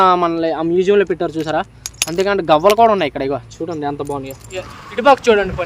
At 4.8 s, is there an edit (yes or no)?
yes